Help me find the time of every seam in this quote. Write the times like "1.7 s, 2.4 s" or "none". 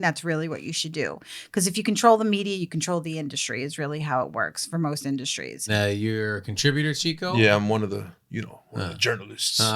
5.7 s

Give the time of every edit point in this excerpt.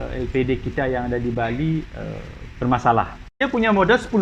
3.2 s

